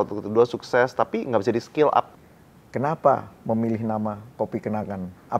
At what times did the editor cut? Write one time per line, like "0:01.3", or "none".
0:02.2